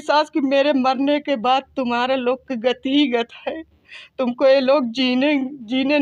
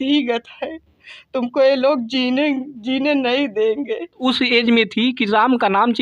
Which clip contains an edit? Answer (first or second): second